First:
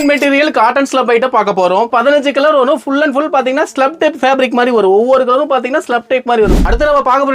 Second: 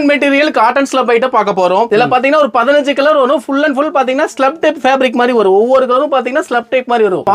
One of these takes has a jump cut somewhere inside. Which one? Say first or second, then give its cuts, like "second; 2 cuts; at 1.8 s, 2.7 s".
first; 2 cuts; at 1.9 s, 6.6 s